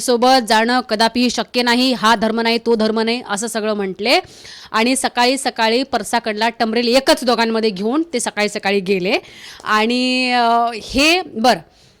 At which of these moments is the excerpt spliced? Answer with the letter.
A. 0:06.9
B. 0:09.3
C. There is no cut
C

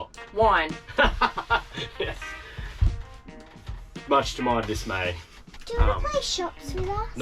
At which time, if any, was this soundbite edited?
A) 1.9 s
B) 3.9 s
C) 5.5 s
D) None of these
C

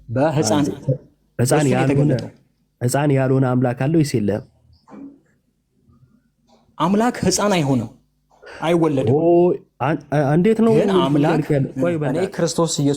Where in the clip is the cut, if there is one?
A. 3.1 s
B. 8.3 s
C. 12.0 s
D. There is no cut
C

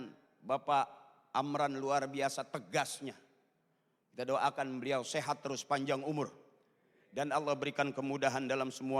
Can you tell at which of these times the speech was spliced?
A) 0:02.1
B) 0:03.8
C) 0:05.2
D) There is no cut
D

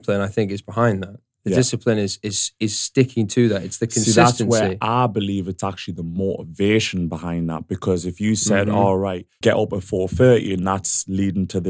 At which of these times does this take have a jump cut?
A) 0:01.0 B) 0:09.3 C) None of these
B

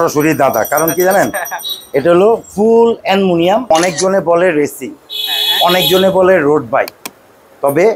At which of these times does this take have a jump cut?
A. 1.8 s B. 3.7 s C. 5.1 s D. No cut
B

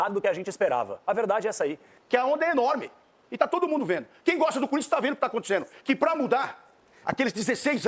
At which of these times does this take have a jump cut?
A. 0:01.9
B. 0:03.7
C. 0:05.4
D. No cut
A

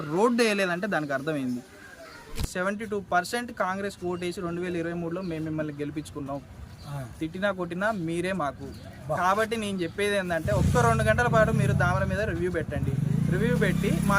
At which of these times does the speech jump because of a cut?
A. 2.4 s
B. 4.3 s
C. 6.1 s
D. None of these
A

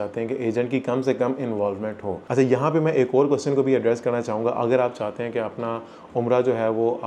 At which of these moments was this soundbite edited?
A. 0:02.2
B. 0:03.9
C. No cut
A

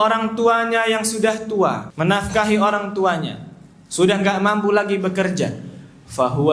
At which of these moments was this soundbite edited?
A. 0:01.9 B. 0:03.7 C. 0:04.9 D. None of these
A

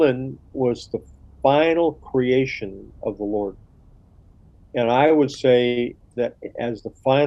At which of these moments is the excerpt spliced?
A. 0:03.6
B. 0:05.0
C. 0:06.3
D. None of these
D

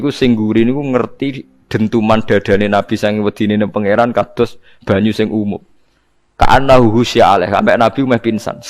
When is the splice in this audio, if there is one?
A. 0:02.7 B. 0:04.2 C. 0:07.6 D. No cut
D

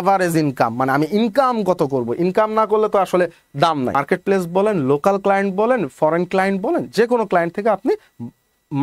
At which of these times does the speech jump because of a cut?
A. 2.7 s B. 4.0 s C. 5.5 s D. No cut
B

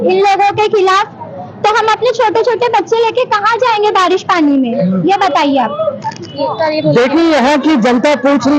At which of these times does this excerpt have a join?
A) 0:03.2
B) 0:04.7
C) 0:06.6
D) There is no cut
D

